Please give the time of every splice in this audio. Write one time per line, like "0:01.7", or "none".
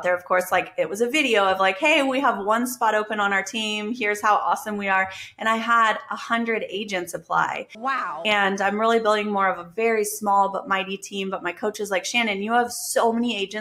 none